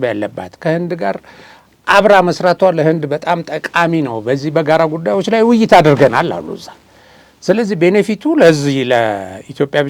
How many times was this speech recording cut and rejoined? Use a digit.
0